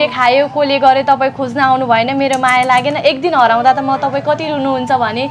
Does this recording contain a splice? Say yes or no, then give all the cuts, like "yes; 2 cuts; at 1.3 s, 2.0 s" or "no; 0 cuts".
no; 0 cuts